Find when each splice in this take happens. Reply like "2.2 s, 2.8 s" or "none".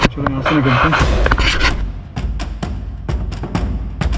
1.5 s